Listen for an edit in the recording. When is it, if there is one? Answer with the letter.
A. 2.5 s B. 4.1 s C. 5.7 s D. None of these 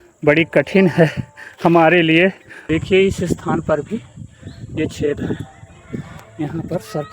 A